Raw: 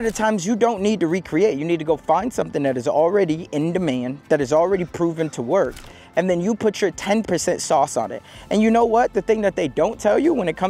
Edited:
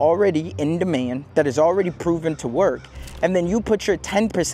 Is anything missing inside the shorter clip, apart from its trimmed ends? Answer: no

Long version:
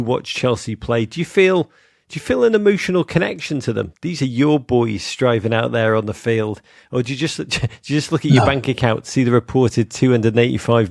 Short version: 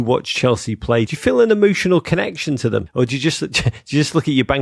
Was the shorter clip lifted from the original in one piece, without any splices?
no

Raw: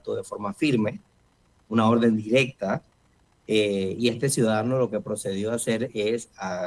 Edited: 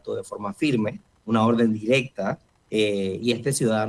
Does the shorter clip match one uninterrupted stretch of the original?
no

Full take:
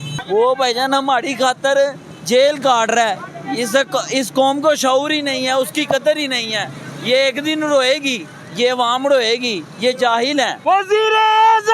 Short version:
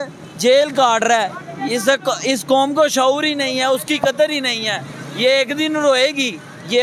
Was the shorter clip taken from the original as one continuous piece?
yes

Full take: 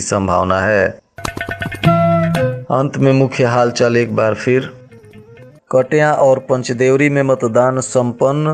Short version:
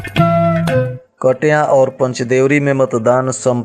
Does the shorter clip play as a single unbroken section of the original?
no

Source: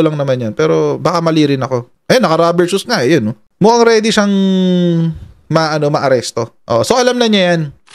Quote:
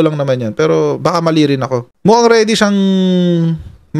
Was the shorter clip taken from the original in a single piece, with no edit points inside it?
no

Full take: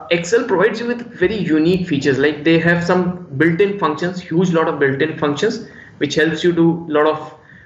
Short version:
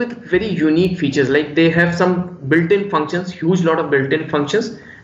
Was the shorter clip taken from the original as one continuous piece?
yes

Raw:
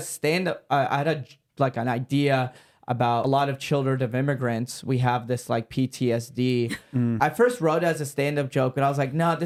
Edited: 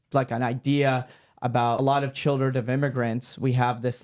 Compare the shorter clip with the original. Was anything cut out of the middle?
no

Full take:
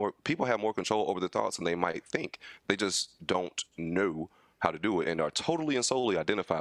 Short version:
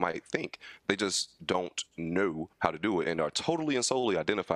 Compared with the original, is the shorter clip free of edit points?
no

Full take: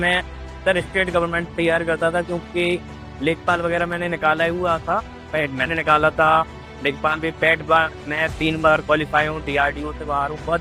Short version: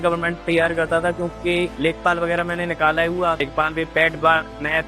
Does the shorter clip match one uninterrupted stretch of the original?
no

